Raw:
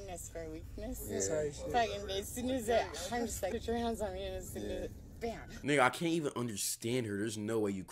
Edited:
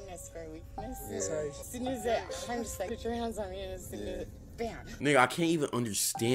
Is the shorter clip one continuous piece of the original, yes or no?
no